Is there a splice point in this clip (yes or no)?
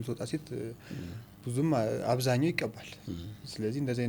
no